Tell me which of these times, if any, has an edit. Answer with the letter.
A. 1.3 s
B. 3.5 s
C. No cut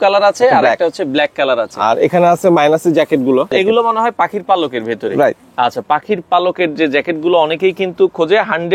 B